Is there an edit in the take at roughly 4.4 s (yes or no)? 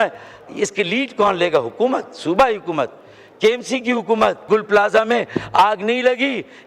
yes